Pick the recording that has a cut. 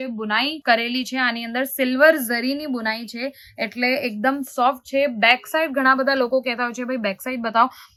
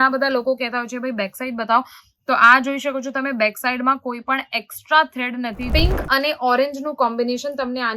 second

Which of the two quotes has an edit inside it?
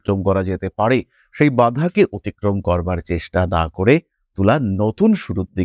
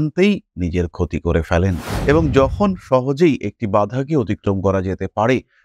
second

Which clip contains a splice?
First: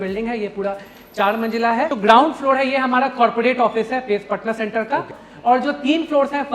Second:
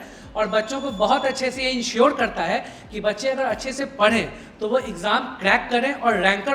first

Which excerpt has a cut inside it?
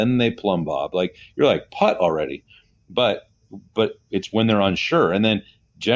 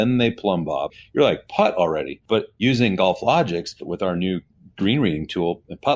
second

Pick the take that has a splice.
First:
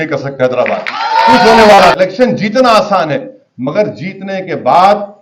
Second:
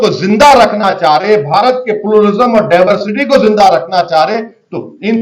first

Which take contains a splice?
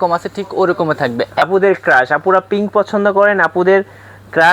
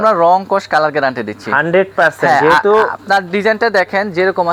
first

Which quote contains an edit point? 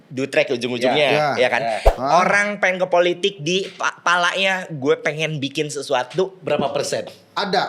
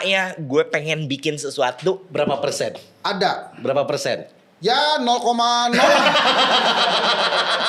first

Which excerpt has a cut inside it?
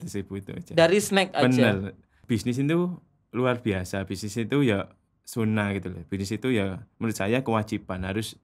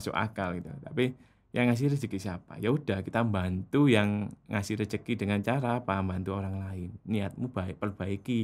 first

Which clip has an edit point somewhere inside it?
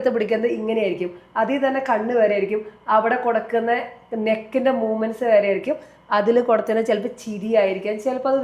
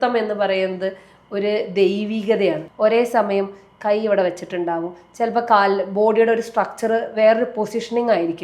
second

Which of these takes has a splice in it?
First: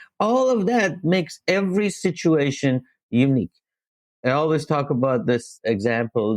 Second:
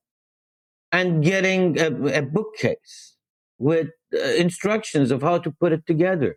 first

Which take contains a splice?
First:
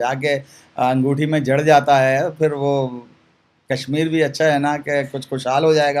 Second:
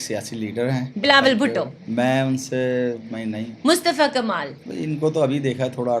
second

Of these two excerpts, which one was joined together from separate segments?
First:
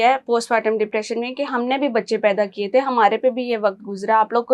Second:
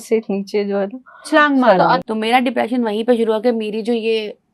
second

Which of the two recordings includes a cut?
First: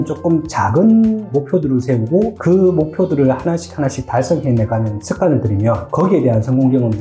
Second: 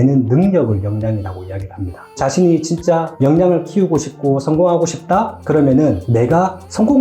second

